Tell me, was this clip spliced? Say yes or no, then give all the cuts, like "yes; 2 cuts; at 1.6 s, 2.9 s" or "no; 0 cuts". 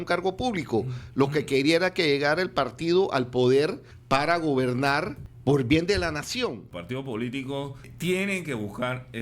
yes; 4 cuts; at 3.9 s, 5.2 s, 6.6 s, 7.9 s